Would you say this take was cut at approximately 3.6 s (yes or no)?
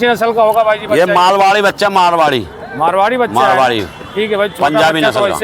no